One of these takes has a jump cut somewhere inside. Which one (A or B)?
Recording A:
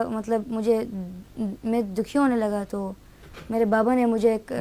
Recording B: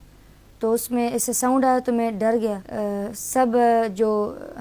B